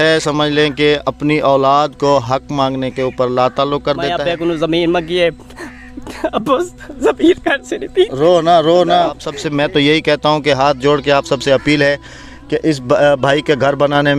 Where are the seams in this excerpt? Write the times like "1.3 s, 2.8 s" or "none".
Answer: 4.2 s, 9.3 s